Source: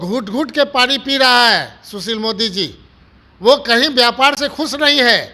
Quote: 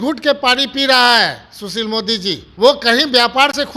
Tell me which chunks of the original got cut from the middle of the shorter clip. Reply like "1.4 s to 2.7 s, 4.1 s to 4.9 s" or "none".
2.8 s to 3.3 s